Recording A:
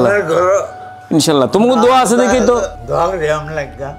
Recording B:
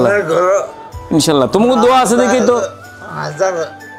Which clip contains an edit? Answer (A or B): A